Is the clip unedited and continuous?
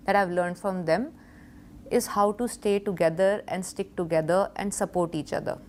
yes; 0 cuts

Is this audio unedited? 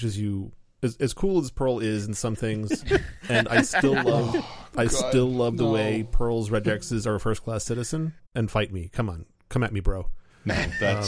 yes; 0 cuts

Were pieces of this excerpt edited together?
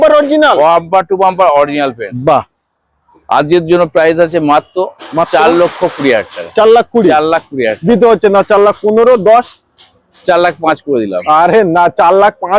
no; 0 cuts

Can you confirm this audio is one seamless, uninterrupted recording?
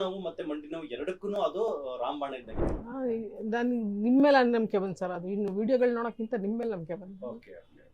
no; 1 cut; at 2.5 s

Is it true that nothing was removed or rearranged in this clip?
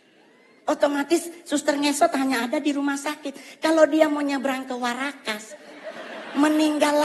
yes; 0 cuts

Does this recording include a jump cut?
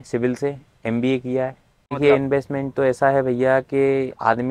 yes; 1 cut; at 2.0 s

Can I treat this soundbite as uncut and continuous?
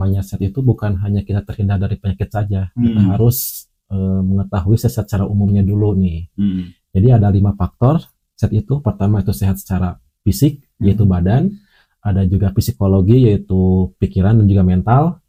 yes; 0 cuts

